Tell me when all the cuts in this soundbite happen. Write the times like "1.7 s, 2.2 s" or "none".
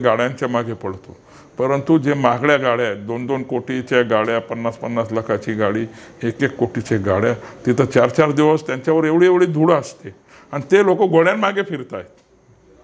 none